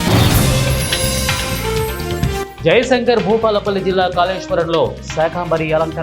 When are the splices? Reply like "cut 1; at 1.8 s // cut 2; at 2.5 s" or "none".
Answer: cut 1; at 2.5 s